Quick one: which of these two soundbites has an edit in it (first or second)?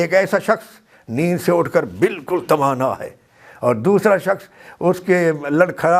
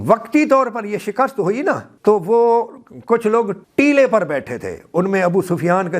second